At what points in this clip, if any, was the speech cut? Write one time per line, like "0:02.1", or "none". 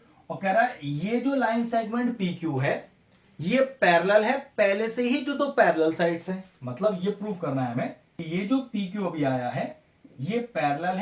0:08.1